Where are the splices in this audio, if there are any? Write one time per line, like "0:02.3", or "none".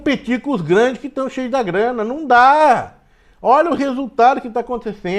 none